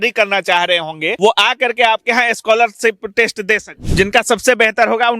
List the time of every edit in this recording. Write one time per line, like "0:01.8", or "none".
0:01.1
0:03.8